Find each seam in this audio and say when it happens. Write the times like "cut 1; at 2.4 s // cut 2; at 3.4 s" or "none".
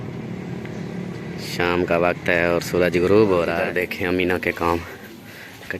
cut 1; at 3.6 s